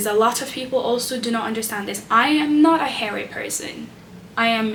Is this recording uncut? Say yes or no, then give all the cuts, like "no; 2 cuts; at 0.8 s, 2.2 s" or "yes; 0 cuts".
yes; 0 cuts